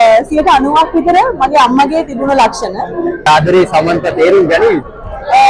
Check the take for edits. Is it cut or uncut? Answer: cut